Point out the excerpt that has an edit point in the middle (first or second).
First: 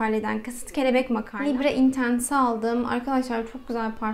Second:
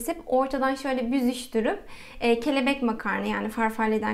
first